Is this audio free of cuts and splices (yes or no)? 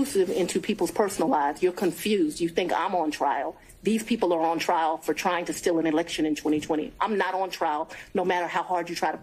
yes